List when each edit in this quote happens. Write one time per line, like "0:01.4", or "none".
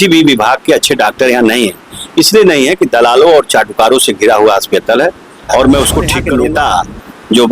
0:06.2